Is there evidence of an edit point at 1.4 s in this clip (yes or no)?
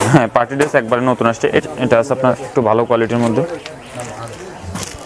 yes